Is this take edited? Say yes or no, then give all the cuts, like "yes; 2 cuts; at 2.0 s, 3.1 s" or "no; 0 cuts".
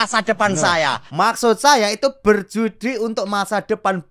yes; 1 cut; at 1.1 s